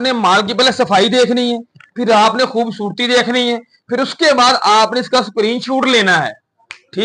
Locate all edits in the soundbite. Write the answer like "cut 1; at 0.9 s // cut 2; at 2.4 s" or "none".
none